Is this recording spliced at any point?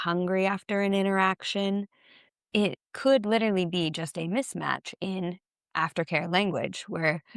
yes; 1 cut; at 2.3 s

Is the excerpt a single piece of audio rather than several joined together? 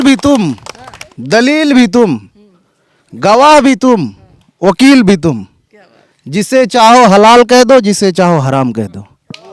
yes; 0 cuts

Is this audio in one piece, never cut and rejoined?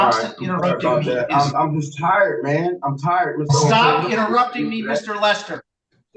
yes; 0 cuts

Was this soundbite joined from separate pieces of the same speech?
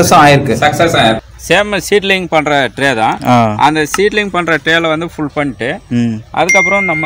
yes; 1 cut; at 1.3 s

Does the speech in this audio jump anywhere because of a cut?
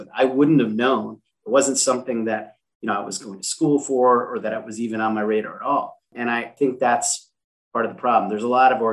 yes; 1 cut; at 6.5 s

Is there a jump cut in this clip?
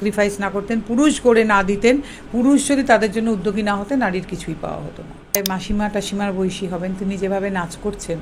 yes; 1 cut; at 5.4 s

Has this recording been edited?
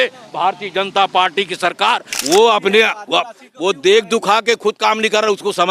yes; 1 cut; at 2.1 s

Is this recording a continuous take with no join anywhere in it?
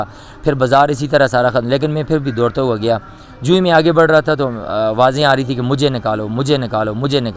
yes; 0 cuts

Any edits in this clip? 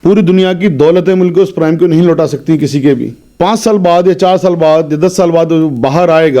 yes; 1 cut; at 3.2 s

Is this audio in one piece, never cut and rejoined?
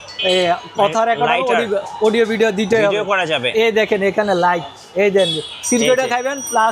yes; 0 cuts

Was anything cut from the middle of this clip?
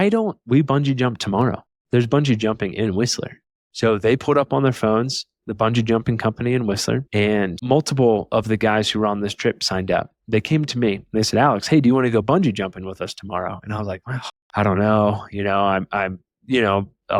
no; 0 cuts

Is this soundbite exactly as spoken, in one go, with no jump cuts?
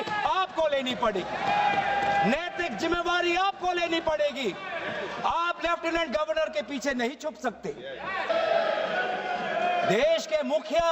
no; 1 cut; at 8.3 s

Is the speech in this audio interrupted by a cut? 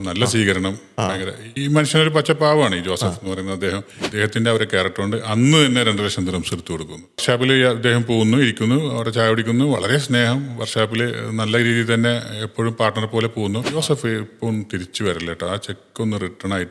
yes; 3 cuts; at 4.0 s, 7.2 s, 13.7 s

